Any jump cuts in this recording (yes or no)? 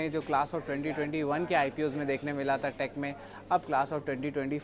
yes